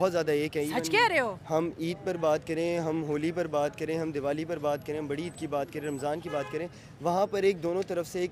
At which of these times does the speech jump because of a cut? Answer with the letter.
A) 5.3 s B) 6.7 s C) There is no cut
C